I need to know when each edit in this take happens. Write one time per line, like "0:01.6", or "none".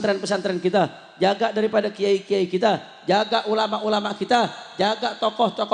none